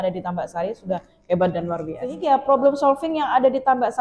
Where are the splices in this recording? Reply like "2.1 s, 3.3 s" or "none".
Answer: 2.2 s